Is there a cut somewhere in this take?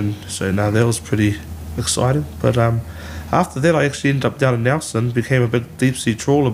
no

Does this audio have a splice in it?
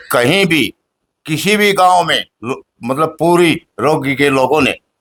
no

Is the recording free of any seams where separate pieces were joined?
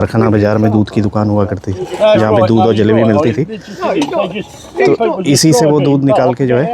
yes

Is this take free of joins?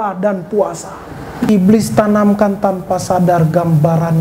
no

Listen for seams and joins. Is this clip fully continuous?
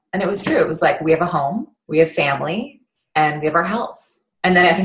no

